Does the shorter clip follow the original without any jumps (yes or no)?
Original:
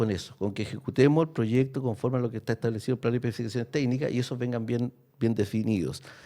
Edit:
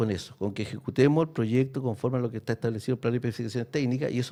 yes